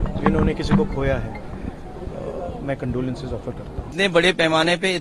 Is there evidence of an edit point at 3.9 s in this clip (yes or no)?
yes